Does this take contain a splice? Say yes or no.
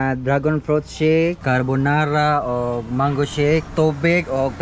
yes